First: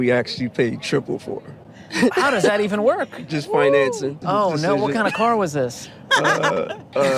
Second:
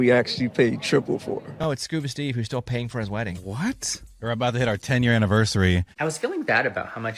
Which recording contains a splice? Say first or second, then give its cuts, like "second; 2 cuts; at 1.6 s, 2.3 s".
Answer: second; 2 cuts; at 1.5 s, 5.9 s